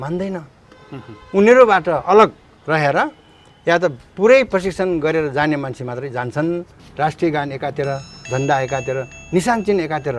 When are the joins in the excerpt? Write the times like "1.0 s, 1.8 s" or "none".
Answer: 6.9 s